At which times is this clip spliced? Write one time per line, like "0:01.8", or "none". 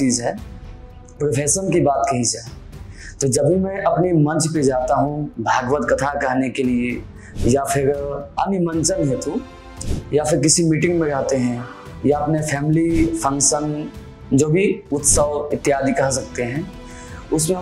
0:08.2